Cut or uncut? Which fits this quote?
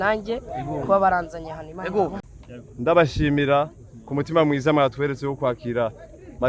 cut